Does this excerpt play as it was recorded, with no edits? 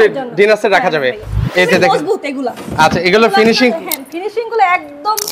no; 1 cut; at 1.4 s

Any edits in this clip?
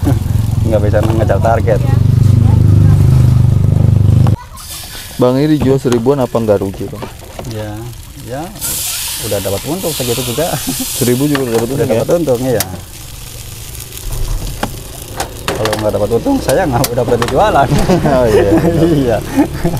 yes; 1 cut; at 4.3 s

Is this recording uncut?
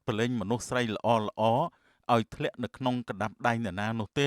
yes; 0 cuts

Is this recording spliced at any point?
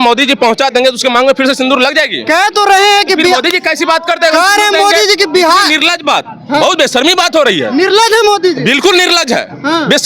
no; 0 cuts

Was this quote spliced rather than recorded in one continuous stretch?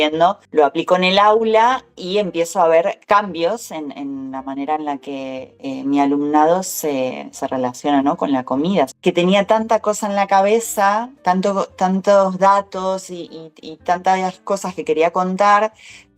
yes; 4 cuts; at 3.0 s, 5.5 s, 8.9 s, 11.1 s

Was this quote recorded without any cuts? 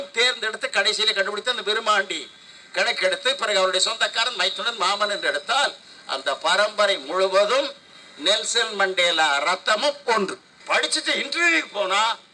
no; 1 cut; at 10.5 s

